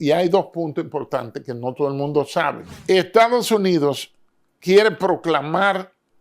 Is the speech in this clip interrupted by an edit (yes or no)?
yes